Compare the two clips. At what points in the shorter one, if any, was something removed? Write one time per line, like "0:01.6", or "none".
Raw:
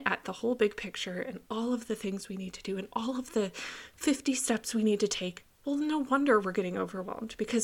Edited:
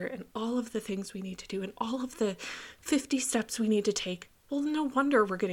none